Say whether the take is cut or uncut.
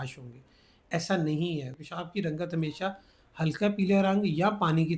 cut